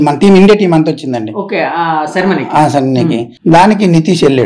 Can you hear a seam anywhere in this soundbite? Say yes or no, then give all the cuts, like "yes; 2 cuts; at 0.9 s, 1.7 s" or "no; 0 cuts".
yes; 1 cut; at 3.3 s